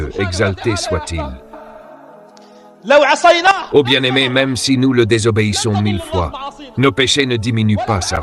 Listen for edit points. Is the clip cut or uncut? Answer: uncut